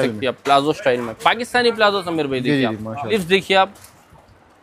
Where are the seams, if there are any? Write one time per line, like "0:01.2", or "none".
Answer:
0:03.1